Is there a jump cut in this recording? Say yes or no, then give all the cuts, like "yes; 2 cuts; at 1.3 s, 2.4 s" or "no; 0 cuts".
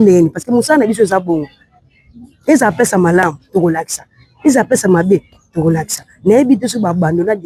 no; 0 cuts